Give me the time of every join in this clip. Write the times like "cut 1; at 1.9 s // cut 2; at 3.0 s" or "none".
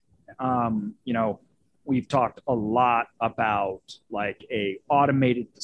none